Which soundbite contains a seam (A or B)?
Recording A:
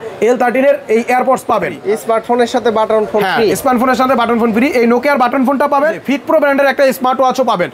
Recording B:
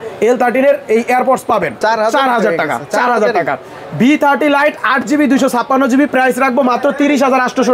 A